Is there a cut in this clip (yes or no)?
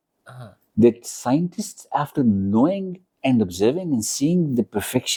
no